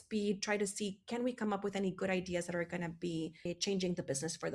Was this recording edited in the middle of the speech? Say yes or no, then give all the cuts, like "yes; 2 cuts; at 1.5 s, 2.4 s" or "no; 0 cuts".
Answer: yes; 1 cut; at 3.5 s